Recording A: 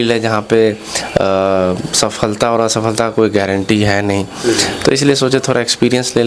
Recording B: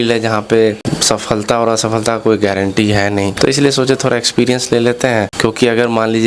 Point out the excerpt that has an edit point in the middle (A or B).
B